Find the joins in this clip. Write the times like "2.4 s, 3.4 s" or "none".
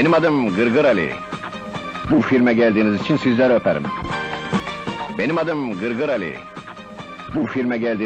3.2 s, 4.7 s